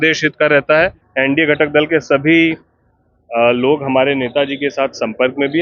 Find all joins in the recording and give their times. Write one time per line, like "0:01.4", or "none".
0:01.0